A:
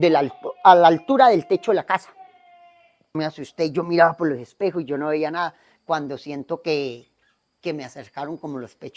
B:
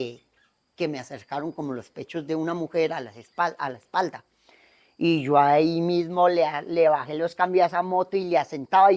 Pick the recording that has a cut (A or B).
A